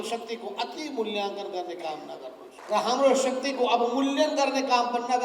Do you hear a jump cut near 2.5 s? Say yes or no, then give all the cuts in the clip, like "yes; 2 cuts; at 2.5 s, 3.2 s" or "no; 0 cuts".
yes; 1 cut; at 2.5 s